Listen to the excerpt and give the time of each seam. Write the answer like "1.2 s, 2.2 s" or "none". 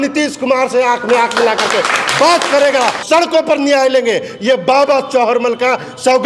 3.0 s